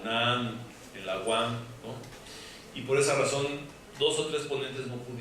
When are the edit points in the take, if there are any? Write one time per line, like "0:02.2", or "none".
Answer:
0:01.5